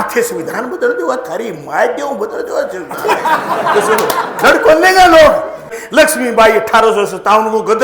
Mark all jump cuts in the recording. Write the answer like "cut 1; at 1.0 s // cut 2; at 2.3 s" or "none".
cut 1; at 5.7 s